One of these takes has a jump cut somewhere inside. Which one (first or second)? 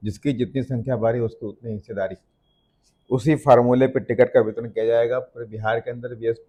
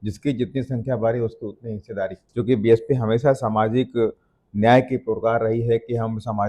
second